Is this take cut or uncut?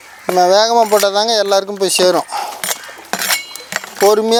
uncut